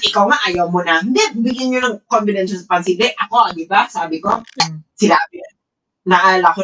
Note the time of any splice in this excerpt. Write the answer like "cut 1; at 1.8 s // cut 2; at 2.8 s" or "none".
cut 1; at 4.6 s